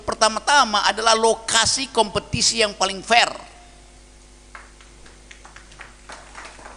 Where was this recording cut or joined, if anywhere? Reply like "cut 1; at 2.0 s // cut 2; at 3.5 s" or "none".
none